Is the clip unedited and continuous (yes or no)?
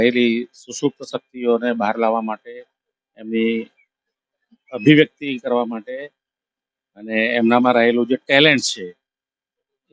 yes